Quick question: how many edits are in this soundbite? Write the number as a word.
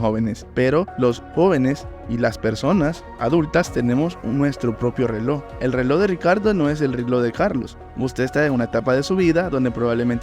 four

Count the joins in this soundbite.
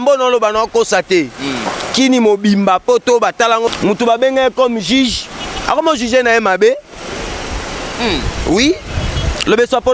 one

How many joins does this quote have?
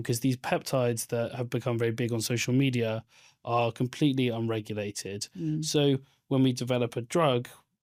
zero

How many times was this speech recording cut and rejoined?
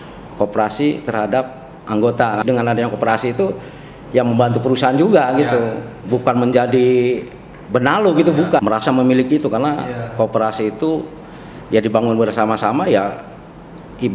two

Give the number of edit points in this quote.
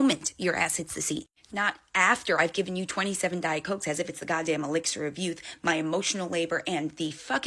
zero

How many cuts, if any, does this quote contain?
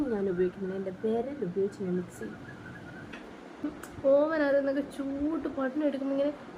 one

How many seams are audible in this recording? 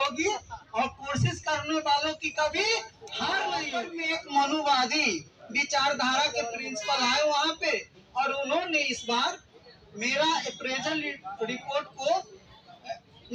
one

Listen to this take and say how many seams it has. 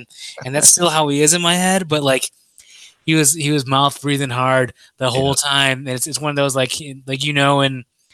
zero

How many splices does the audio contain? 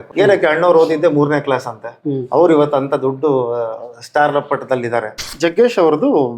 one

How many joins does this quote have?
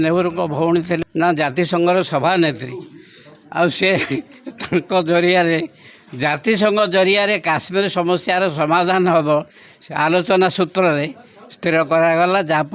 one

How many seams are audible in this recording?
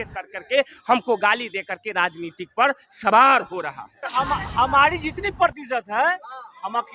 one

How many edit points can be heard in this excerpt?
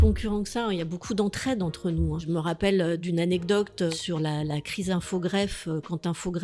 three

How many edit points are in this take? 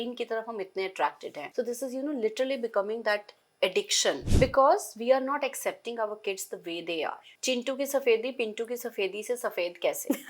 three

